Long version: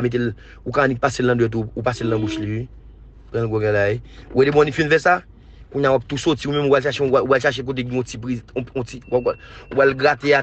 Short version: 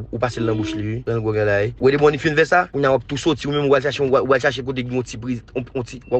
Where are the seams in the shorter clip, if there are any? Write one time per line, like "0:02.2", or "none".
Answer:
0:01.0
0:01.7
0:02.7